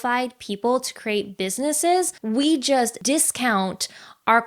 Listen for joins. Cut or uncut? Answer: cut